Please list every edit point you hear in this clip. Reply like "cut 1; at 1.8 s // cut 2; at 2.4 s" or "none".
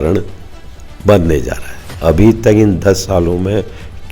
cut 1; at 2.0 s